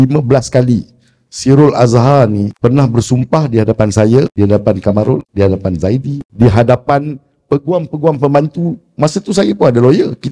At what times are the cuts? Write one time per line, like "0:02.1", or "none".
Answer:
0:02.5
0:04.3
0:05.3
0:06.2

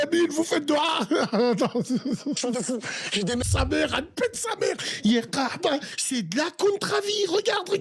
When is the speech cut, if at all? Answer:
0:03.4

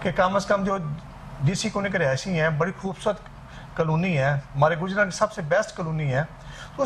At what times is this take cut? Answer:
none

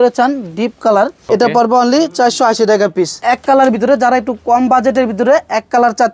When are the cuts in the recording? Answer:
0:01.2
0:03.2

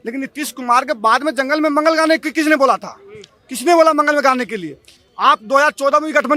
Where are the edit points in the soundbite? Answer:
none

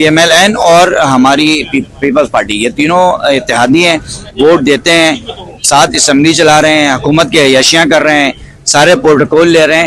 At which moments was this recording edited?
none

